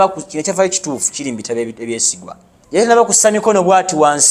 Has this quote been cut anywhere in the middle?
yes; 1 cut; at 2.8 s

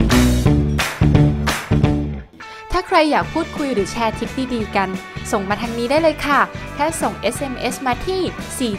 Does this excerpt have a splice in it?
yes; 1 cut; at 2.2 s

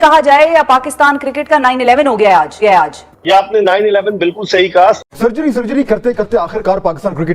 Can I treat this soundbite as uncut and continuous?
no; 1 cut; at 5.0 s

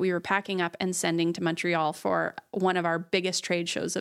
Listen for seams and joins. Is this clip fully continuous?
yes; 0 cuts

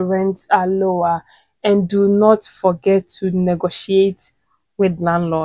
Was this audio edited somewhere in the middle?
no; 0 cuts

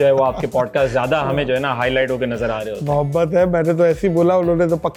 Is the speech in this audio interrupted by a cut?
no; 0 cuts

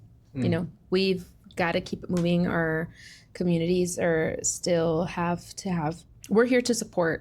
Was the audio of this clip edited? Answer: yes; 1 cut; at 6.0 s

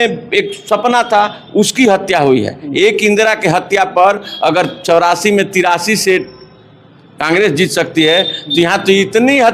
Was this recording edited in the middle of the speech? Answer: no; 0 cuts

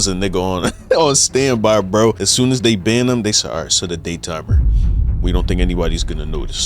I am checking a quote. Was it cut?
yes; 1 cut; at 2.2 s

